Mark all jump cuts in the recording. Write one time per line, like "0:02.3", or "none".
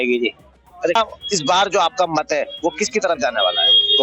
0:01.0